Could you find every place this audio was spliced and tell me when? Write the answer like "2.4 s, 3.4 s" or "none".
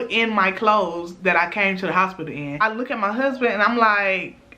2.6 s

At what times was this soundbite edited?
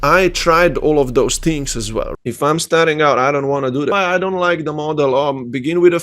2.1 s, 3.9 s

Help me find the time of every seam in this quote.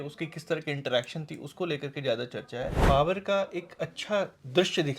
2.8 s

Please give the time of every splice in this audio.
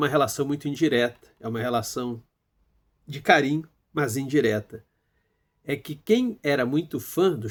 none

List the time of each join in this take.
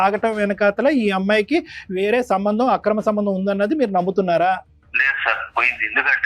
4.8 s

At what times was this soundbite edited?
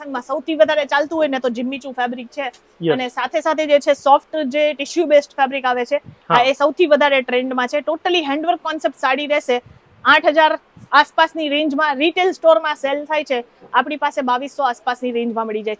none

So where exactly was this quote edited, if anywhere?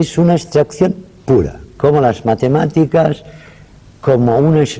1.2 s

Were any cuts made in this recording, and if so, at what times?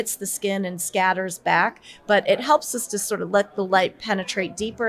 none

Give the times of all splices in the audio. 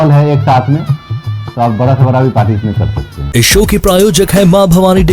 none

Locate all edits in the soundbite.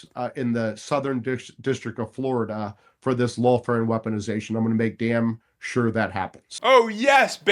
6.4 s

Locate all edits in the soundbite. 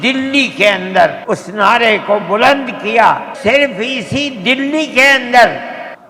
3.3 s

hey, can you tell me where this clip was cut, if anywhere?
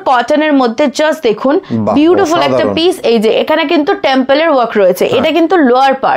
none

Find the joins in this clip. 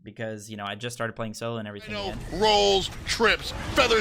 1.9 s

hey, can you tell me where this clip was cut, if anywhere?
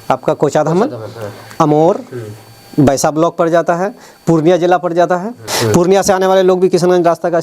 5.5 s

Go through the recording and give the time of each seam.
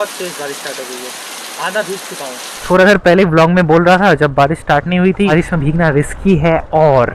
2.6 s, 5.3 s

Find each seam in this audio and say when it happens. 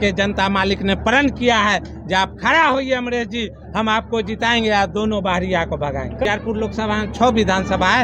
6.3 s

